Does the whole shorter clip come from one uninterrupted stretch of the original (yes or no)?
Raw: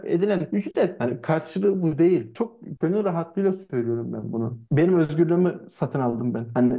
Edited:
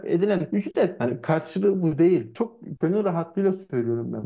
yes